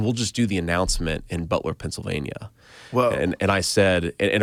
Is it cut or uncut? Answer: uncut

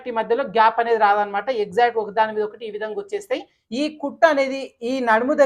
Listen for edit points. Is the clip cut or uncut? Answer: cut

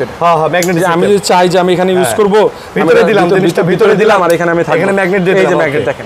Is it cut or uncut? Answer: uncut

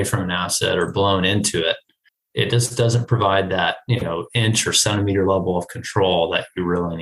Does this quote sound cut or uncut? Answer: uncut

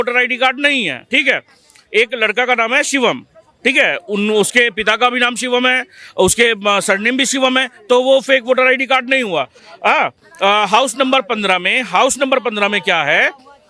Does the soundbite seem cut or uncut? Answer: uncut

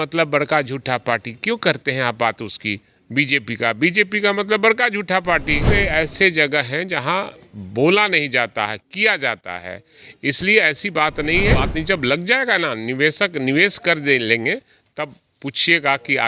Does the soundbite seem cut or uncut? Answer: cut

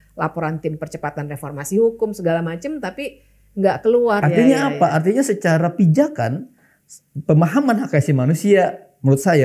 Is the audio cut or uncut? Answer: cut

